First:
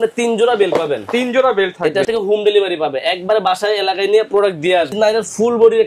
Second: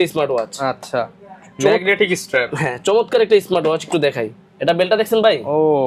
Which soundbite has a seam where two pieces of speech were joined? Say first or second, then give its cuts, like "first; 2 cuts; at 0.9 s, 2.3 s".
first; 2 cuts; at 2.1 s, 4.9 s